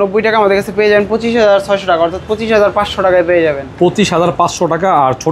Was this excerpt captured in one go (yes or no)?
yes